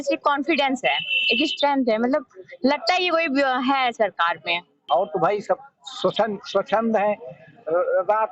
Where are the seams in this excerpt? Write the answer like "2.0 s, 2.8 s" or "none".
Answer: 4.8 s